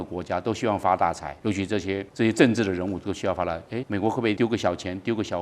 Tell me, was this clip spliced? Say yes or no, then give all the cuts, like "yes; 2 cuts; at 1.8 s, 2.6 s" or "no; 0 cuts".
yes; 2 cuts; at 1.7 s, 4.0 s